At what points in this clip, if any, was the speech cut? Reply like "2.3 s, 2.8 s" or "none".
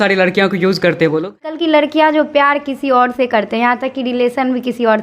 1.6 s